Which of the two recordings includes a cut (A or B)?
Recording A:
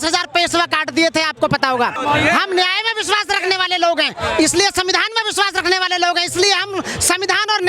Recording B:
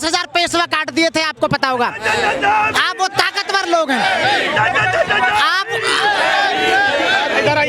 A